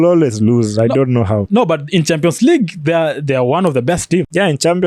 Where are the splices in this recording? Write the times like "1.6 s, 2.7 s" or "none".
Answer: none